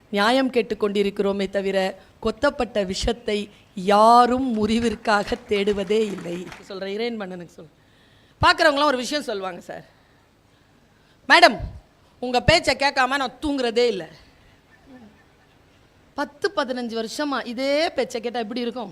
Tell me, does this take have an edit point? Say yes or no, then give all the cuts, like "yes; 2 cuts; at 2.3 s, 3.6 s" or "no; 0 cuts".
yes; 1 cut; at 6.7 s